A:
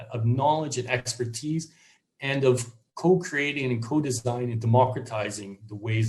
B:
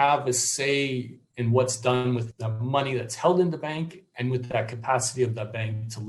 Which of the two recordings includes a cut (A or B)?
B